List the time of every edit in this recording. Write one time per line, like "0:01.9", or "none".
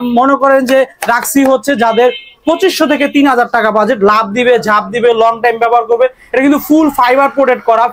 none